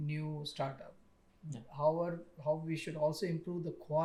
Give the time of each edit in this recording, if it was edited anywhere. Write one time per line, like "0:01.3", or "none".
none